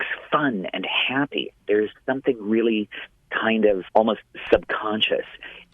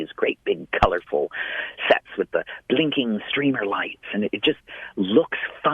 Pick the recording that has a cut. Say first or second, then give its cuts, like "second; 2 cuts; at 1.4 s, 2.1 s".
first; 1 cut; at 3.8 s